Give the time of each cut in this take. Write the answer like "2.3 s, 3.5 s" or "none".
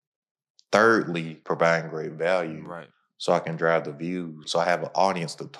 1.3 s, 4.4 s